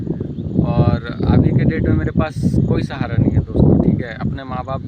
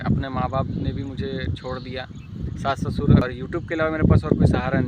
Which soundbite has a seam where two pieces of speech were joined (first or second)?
second